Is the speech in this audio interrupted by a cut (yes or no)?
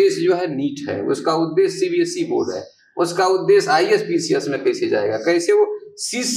no